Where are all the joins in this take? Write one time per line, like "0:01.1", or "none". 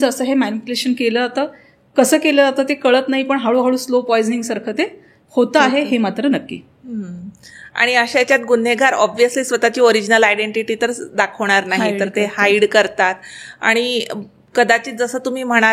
none